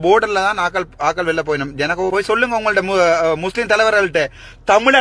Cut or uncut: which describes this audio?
cut